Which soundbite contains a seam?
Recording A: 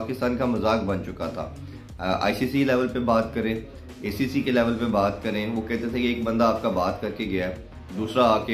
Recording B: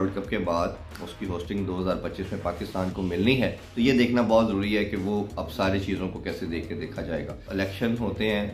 B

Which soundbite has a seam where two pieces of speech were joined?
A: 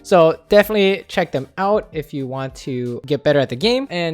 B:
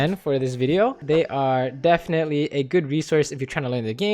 B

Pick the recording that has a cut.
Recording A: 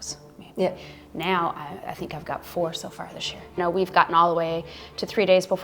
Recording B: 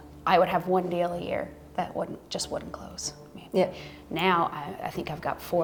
A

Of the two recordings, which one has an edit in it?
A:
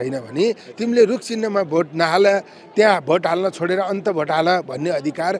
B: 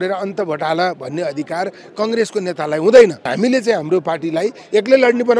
B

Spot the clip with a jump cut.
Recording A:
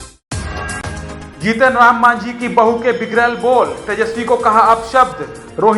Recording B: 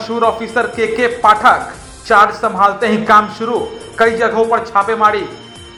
A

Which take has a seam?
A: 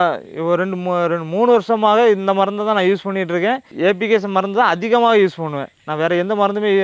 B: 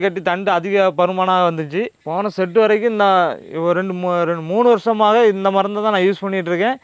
B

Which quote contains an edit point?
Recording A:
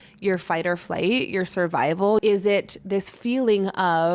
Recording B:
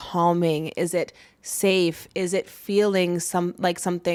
A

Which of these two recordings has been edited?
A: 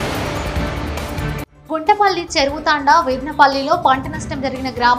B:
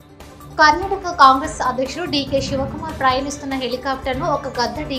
A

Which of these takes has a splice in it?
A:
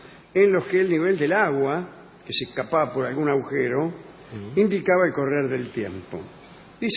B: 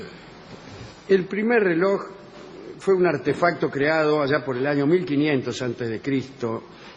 B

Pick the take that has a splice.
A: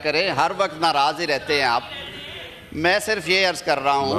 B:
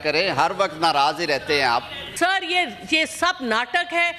B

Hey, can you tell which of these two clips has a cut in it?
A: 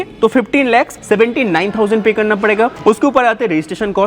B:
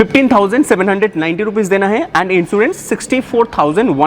A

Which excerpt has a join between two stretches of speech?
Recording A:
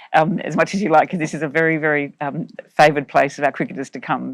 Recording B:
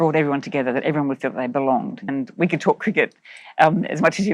B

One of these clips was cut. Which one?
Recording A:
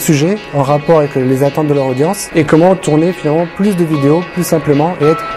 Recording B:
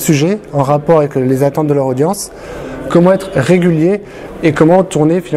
A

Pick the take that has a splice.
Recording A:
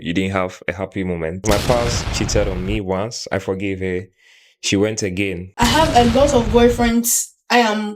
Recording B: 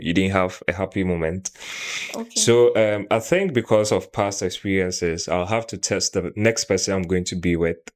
A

